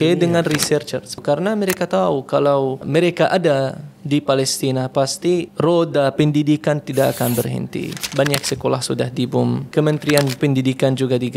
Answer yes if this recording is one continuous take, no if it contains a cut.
no